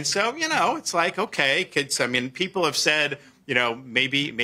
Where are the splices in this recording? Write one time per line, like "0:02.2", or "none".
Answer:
none